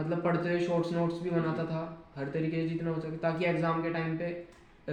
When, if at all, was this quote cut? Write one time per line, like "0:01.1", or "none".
none